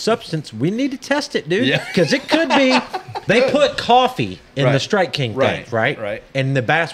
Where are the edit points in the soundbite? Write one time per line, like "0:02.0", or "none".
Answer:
0:03.1